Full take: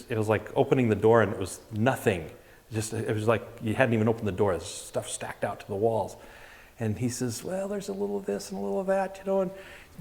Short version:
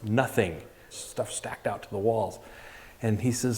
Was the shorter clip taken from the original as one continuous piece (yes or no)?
no